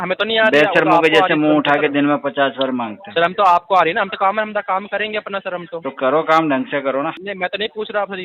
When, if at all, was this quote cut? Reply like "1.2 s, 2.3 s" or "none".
7.2 s

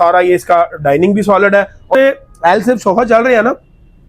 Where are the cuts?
1.9 s

